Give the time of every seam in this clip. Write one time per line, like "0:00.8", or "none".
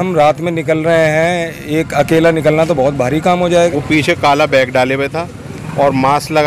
0:03.5